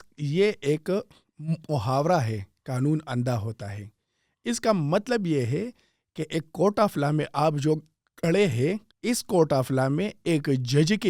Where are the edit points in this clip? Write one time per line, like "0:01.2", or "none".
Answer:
0:08.9